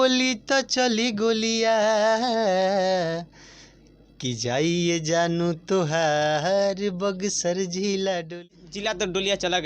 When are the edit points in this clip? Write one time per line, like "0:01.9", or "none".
0:08.5